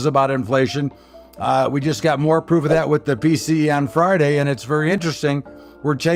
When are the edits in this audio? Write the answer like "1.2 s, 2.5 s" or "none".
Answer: none